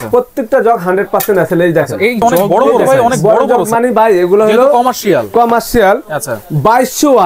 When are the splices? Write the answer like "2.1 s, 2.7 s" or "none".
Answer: 3.2 s